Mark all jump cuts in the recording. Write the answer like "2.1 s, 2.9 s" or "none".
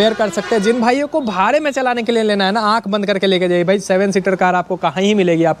none